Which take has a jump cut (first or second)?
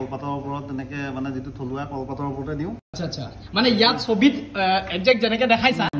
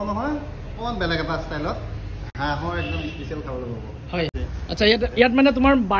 second